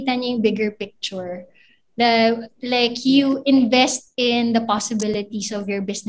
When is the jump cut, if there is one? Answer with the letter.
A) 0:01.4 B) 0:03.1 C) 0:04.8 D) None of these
D